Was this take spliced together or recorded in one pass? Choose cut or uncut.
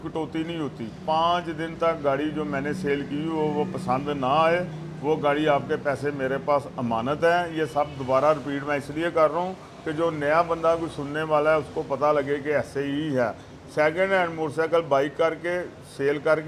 uncut